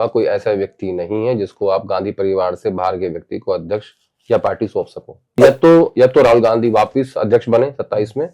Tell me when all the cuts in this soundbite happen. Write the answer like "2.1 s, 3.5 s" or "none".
5.4 s